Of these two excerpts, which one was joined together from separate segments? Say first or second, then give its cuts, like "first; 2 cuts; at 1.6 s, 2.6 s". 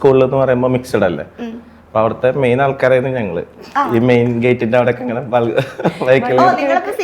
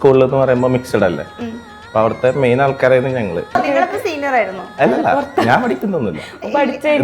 second; 1 cut; at 3.6 s